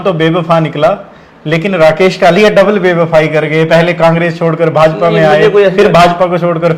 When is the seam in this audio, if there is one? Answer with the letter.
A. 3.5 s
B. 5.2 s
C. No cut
C